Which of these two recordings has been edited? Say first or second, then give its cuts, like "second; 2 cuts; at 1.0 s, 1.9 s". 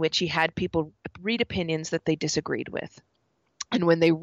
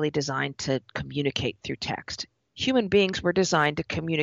second; 1 cut; at 2.4 s